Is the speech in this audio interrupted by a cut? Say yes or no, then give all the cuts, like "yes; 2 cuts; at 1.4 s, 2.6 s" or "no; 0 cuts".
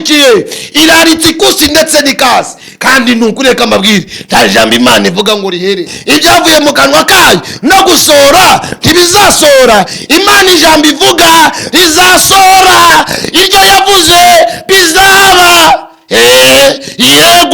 yes; 1 cut; at 5.9 s